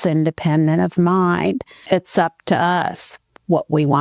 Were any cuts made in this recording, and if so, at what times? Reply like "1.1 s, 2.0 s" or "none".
1.8 s